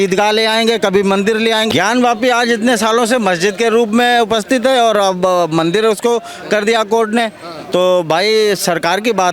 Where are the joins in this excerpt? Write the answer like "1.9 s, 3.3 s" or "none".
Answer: 1.7 s